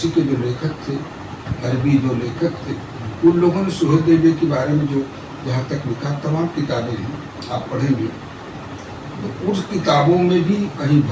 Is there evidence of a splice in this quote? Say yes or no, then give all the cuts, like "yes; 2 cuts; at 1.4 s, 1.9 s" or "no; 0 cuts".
no; 0 cuts